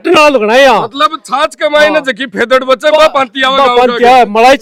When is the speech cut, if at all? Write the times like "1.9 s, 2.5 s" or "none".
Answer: none